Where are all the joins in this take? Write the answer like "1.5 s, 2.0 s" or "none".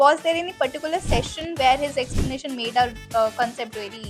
none